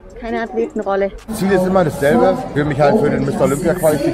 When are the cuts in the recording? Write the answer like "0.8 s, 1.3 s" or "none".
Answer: 1.3 s, 2.5 s